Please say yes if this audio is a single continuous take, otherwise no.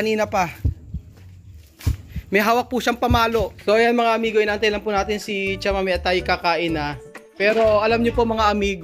no